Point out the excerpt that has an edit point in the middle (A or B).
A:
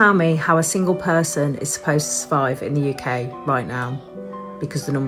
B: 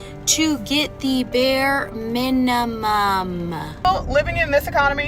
B